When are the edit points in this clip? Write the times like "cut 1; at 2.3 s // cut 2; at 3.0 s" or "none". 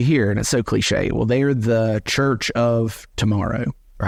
none

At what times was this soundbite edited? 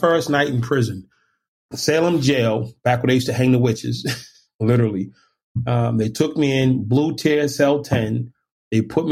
cut 1; at 1.4 s

